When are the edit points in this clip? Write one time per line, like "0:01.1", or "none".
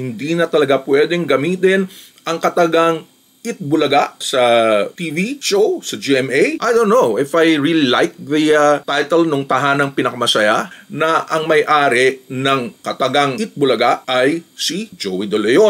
0:06.6
0:10.7